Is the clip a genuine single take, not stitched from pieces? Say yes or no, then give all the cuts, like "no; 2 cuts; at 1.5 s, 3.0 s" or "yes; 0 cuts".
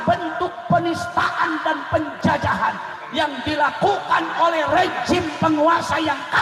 yes; 0 cuts